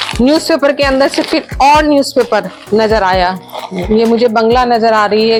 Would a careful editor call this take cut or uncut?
uncut